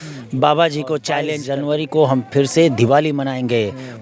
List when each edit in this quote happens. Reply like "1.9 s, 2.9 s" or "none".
1.4 s